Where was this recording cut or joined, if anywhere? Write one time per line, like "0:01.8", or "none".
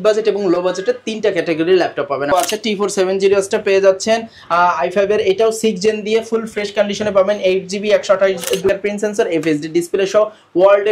0:02.3
0:08.7

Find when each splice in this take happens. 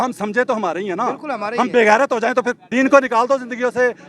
0:02.6

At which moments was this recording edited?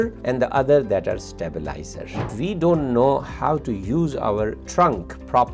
0:02.2

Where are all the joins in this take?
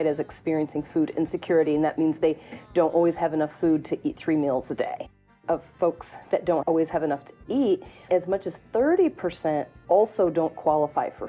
0:05.2
0:06.6

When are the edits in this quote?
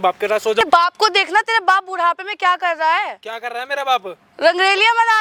none

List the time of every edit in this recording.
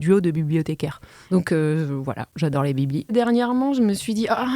0:01.1
0:03.1

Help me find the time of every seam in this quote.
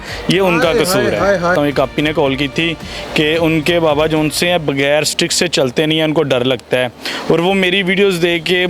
0:01.5

